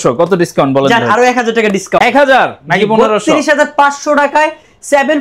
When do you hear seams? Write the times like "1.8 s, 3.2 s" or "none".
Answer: none